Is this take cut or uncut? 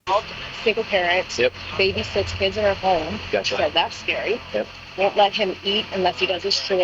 cut